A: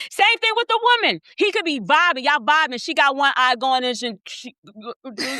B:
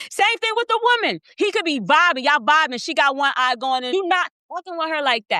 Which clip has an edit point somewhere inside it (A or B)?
B